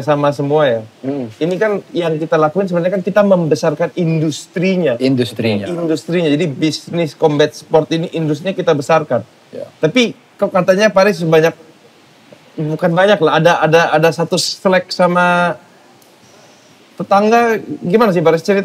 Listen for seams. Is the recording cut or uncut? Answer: uncut